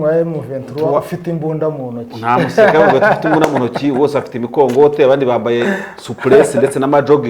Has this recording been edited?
no; 0 cuts

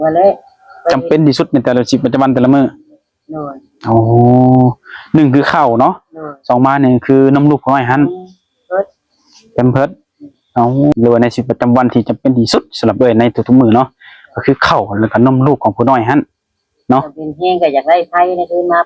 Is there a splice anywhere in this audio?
yes; 1 cut; at 10.9 s

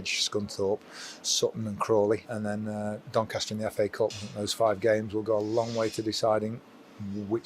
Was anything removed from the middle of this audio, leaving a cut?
yes; 2 cuts; at 2.3 s, 4.2 s

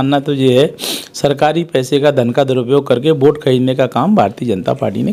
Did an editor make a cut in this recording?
no; 0 cuts

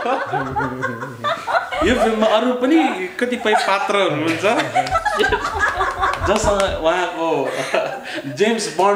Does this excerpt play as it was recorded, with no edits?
yes; 0 cuts

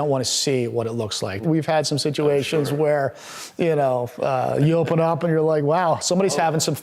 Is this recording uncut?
no; 1 cut; at 1.4 s

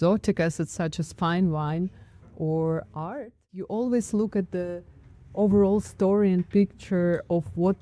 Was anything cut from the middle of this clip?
yes; 1 cut; at 3.7 s

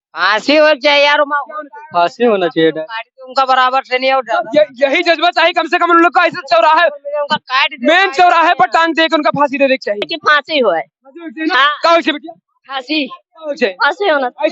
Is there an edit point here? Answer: yes; 1 cut; at 10.2 s

